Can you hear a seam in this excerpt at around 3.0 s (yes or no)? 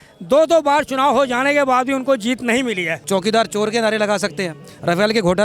yes